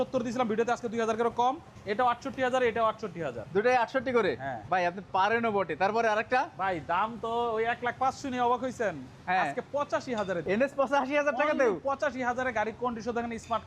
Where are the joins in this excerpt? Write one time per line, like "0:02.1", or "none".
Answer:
0:04.5
0:10.4